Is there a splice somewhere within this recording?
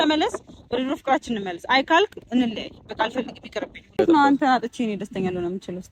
yes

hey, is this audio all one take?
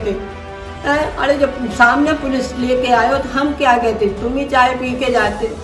yes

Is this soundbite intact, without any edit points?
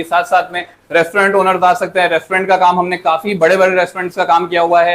yes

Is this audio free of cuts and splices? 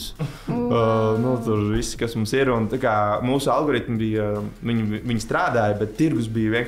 yes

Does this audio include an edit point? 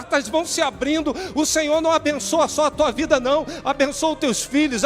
no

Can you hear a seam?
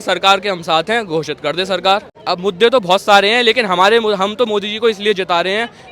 yes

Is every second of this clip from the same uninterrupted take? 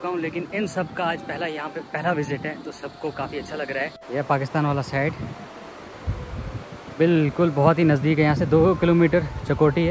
no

